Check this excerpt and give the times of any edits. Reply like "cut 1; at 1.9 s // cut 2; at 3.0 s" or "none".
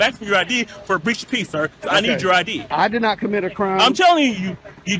cut 1; at 2.6 s